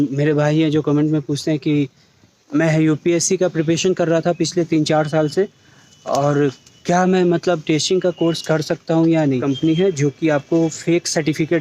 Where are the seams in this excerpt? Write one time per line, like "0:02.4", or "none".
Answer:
0:09.4